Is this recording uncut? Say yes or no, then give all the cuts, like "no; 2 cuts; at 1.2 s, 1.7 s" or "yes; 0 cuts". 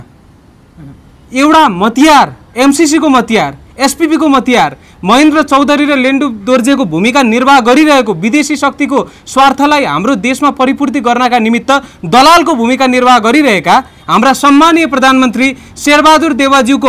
yes; 0 cuts